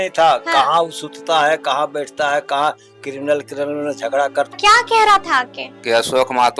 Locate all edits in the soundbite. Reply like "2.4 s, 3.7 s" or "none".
4.5 s